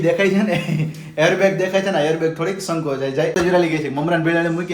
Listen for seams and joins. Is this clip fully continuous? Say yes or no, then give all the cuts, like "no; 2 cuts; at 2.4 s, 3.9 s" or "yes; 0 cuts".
no; 1 cut; at 3.3 s